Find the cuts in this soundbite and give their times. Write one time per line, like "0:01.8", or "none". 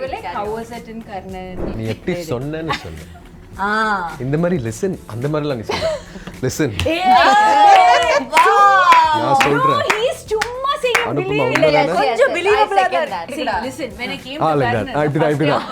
0:01.7
0:13.3